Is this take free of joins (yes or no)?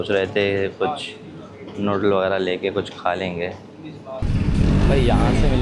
no